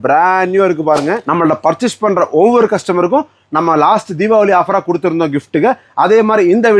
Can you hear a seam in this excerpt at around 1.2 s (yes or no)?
yes